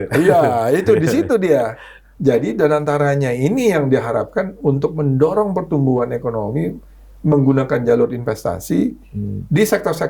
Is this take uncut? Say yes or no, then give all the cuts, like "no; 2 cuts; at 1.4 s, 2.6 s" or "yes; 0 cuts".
yes; 0 cuts